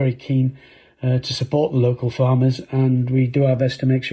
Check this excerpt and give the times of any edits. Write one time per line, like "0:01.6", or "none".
none

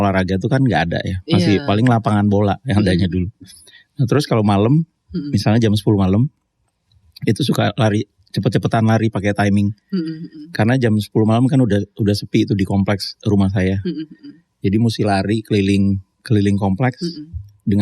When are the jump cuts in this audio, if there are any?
none

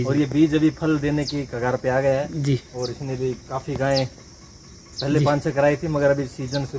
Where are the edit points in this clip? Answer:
none

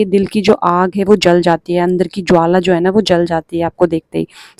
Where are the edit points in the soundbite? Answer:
none

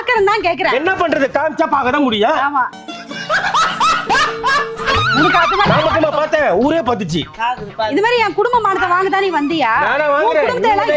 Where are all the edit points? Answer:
none

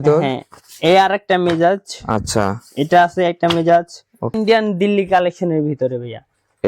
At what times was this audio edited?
0:04.3

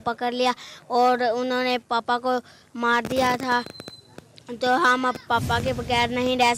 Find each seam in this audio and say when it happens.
none

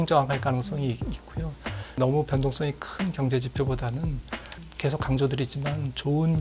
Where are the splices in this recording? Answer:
0:02.0
0:04.7

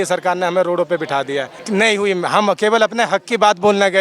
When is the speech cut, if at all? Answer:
0:01.5

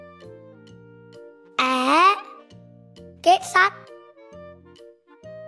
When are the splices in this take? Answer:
none

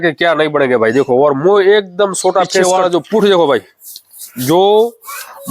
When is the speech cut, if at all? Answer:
0:02.6

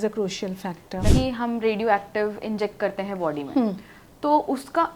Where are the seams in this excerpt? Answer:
0:01.1

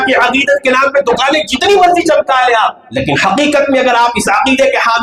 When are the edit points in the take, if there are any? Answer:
none

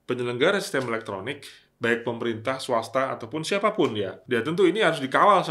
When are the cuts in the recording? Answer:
0:04.2

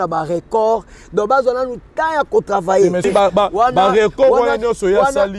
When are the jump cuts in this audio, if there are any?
0:03.1

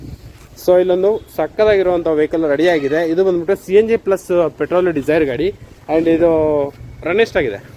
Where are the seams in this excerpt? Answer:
none

